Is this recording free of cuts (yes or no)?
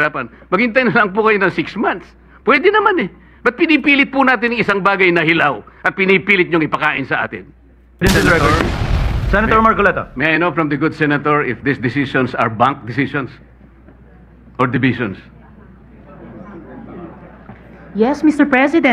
no